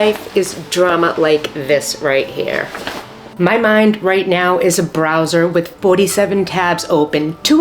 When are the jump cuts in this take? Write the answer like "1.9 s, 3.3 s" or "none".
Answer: 3.0 s